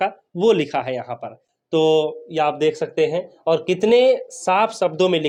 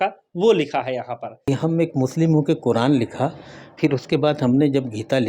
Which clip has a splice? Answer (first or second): second